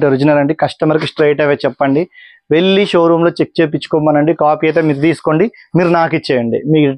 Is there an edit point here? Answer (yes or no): no